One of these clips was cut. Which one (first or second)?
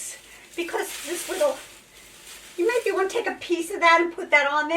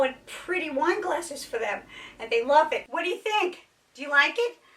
second